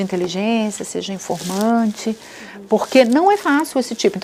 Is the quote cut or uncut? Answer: uncut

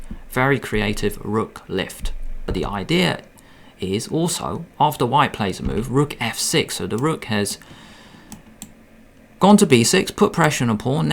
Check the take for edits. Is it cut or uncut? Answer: cut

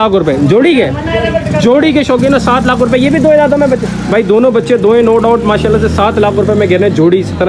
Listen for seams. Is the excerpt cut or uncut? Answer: uncut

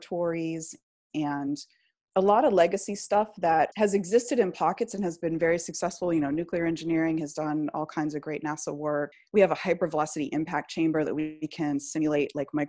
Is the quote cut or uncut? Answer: cut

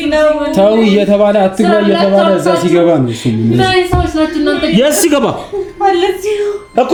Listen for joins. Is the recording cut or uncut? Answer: uncut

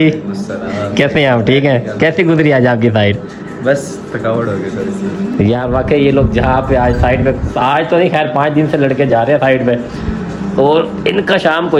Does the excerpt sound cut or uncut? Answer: uncut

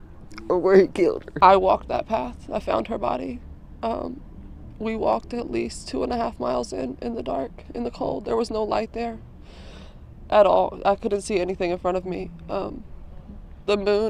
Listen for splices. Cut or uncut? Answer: cut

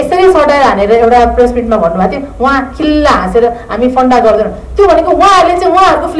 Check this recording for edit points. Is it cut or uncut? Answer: uncut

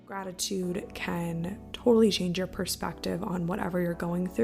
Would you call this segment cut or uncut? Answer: uncut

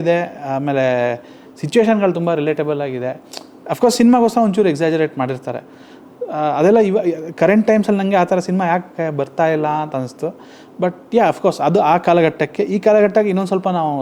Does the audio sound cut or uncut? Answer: uncut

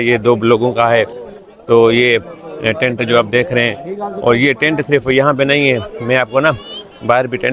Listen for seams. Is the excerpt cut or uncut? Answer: uncut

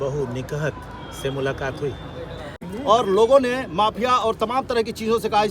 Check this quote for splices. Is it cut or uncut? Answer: cut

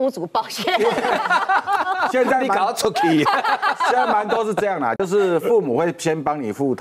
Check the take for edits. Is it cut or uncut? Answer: uncut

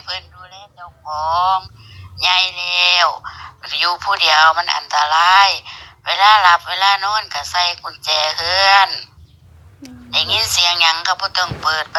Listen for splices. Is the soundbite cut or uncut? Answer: uncut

